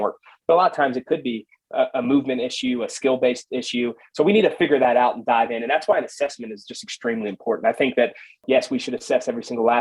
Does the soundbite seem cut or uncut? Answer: cut